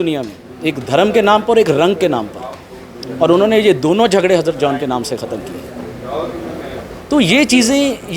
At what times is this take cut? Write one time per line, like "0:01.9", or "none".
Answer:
none